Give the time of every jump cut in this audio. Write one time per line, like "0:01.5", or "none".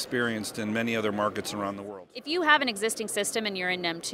0:01.8